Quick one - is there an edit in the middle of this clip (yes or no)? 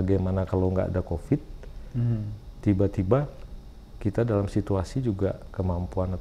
no